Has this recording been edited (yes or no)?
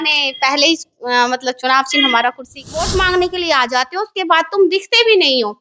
yes